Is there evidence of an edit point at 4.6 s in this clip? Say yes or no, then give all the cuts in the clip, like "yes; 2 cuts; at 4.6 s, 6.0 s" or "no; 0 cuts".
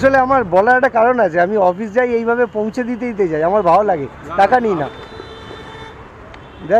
yes; 1 cut; at 4.6 s